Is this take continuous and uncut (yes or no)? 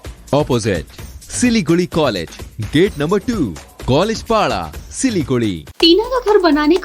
no